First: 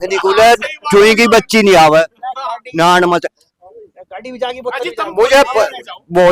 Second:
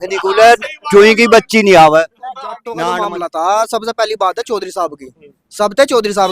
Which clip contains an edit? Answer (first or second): second